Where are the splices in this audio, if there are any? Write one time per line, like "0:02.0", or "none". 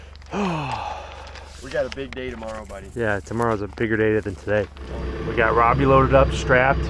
0:05.1